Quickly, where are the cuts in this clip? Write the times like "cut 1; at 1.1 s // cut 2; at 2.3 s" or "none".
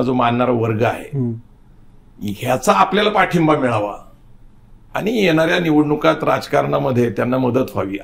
none